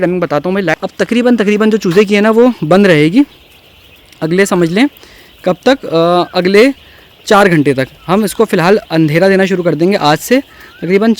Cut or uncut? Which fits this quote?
uncut